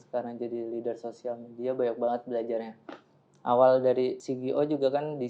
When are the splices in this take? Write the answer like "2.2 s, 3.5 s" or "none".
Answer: 4.3 s